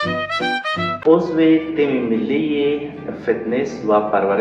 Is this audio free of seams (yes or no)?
no